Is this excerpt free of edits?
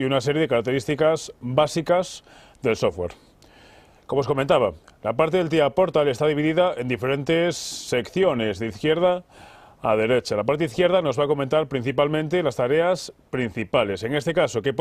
yes; 0 cuts

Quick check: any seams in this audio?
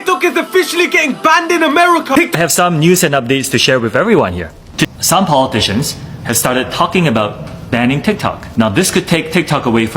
yes; 2 cuts; at 2.3 s, 4.9 s

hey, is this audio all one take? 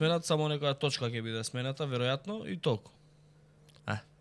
yes; 0 cuts

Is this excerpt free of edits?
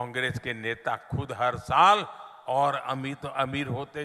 yes; 0 cuts

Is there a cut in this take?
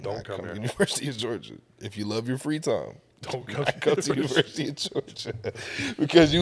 no; 0 cuts

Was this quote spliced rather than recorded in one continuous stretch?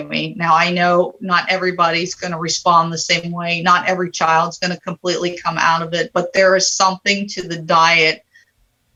no; 0 cuts

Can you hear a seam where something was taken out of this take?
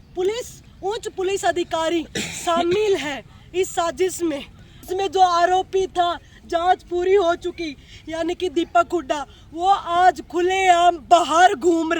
yes; 1 cut; at 4.9 s

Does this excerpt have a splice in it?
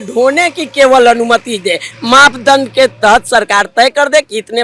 no; 0 cuts

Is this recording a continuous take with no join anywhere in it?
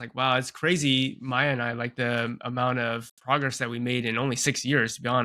yes; 0 cuts

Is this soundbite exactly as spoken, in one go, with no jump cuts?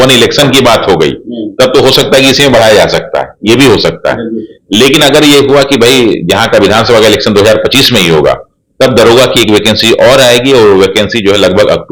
yes; 0 cuts

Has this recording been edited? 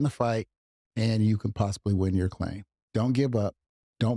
no; 0 cuts

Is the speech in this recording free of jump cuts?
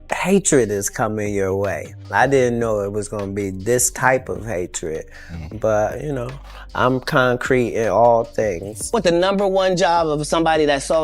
no; 1 cut; at 8.8 s

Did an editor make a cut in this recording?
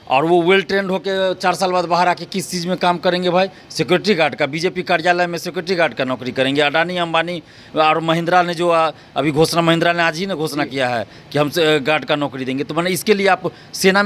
no; 0 cuts

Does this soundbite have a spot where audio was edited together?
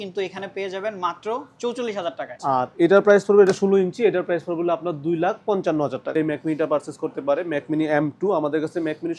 yes; 2 cuts; at 2.3 s, 6.2 s

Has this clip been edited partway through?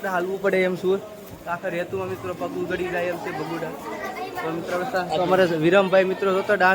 no; 0 cuts

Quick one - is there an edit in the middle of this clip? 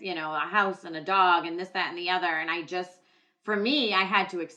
no; 0 cuts

